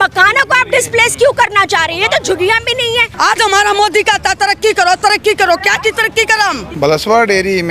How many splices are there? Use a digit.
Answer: 2